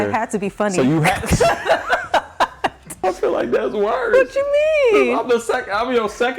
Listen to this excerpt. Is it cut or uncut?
cut